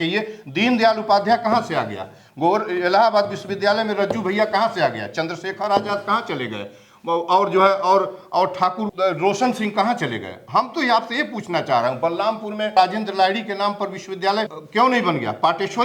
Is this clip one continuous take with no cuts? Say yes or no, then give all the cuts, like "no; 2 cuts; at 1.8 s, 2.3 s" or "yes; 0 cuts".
no; 3 cuts; at 8.9 s, 12.7 s, 14.6 s